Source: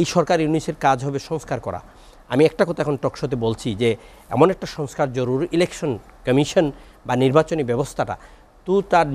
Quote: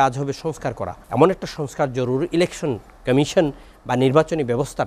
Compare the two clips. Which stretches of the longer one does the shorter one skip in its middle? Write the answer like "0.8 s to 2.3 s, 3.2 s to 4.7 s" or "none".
1.8 s to 4.2 s